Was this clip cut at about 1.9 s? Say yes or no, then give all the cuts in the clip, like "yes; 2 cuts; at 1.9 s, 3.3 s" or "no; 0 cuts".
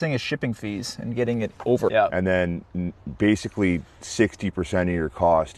yes; 1 cut; at 1.9 s